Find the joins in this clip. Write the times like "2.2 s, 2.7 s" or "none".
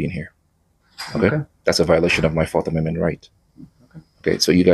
none